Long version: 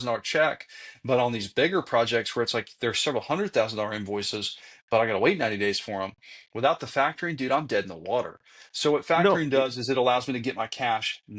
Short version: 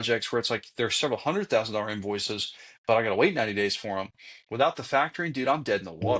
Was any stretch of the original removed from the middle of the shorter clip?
no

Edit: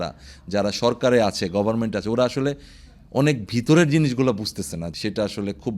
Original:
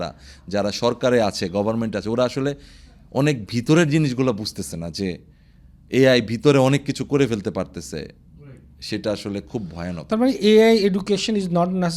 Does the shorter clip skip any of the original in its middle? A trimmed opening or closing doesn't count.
yes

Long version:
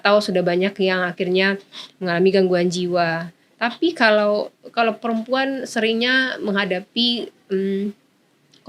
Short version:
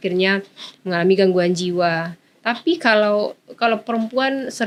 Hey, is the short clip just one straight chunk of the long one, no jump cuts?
yes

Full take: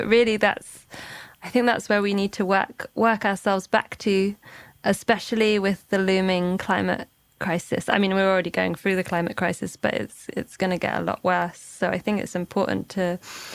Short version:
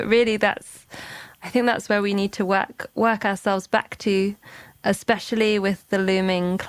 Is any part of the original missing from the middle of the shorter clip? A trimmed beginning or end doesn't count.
no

